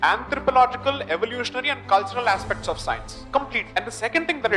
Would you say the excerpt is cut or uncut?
cut